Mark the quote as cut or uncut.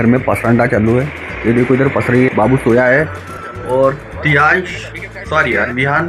uncut